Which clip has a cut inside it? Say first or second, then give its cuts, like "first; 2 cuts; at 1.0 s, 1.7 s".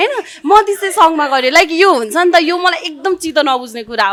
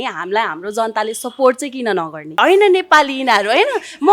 second; 1 cut; at 2.4 s